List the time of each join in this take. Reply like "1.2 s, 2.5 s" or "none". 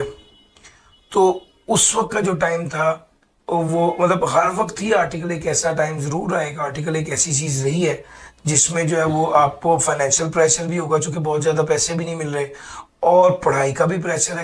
none